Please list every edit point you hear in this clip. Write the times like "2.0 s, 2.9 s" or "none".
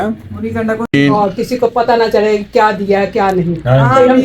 0.9 s